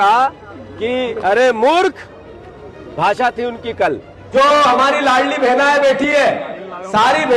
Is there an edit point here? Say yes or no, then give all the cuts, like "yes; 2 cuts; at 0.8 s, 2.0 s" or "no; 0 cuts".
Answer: yes; 1 cut; at 4.1 s